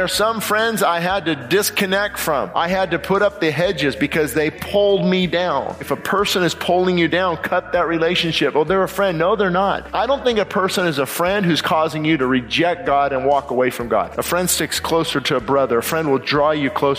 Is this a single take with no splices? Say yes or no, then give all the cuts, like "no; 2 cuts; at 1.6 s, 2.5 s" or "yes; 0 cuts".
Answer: no; 5 cuts; at 2.5 s, 4.6 s, 5.9 s, 9.8 s, 14.1 s